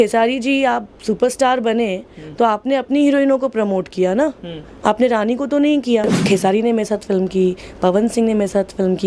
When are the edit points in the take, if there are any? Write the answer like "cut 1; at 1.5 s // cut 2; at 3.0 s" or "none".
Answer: cut 1; at 6.2 s